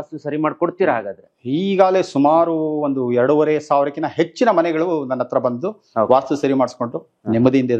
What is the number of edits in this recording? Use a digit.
0